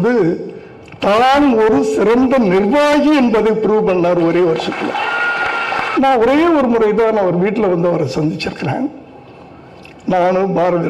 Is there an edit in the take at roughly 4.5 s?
no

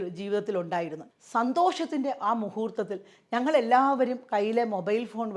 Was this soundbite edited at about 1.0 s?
yes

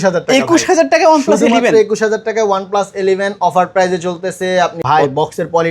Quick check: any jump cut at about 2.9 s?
no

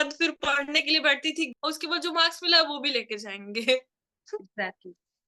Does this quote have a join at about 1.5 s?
yes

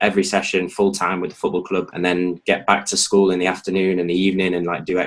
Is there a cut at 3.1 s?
no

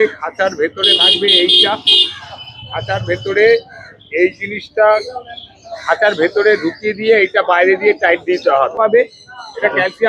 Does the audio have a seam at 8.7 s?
yes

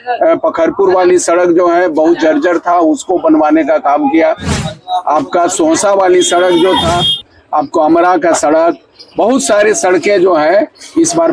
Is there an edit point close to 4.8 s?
no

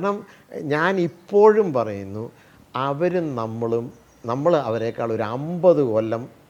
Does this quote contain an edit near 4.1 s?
no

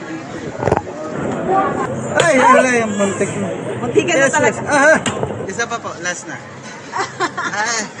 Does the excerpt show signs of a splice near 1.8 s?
yes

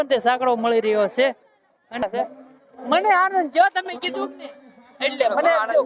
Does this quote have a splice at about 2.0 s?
yes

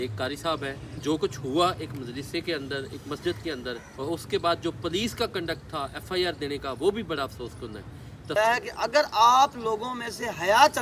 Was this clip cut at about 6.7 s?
no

